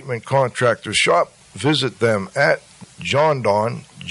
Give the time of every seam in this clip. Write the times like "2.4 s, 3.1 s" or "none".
2.8 s